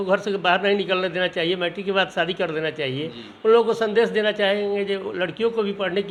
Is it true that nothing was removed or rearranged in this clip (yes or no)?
yes